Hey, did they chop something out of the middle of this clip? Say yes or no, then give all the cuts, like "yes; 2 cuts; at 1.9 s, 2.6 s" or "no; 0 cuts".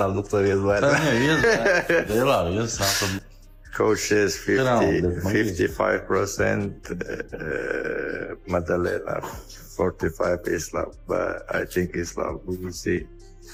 no; 0 cuts